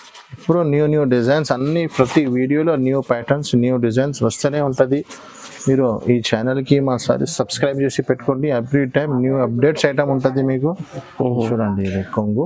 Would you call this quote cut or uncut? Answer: uncut